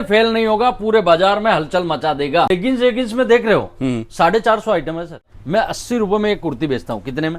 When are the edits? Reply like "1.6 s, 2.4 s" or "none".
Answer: 2.5 s, 5.3 s